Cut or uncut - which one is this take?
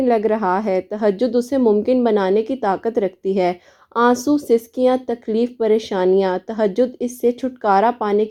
uncut